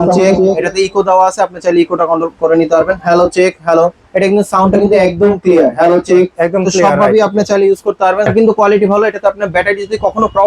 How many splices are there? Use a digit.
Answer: 1